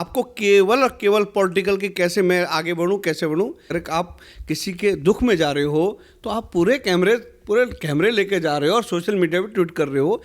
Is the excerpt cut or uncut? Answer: cut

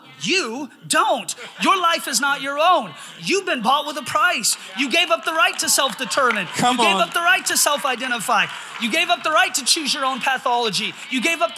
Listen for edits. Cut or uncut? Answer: uncut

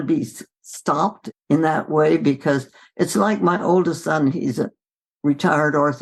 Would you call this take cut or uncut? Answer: cut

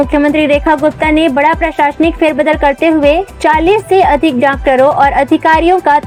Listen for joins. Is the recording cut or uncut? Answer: uncut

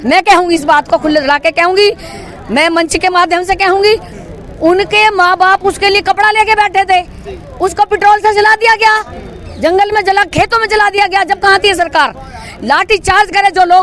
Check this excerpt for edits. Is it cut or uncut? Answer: uncut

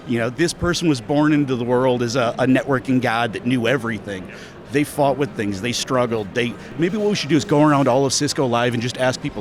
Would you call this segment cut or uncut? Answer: uncut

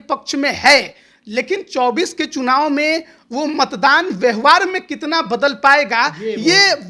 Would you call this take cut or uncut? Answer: uncut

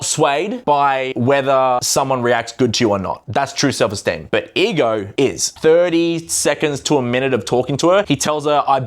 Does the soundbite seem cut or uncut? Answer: cut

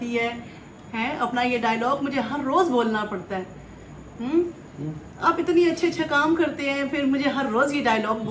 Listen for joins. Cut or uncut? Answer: uncut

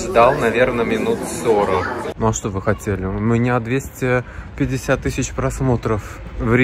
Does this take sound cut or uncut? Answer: cut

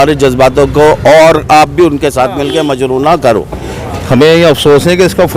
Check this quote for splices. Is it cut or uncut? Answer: cut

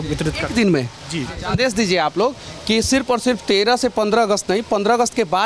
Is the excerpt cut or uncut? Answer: cut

